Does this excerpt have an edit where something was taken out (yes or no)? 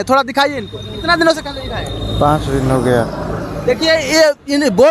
no